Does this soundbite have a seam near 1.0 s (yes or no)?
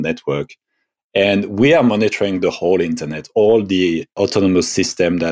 no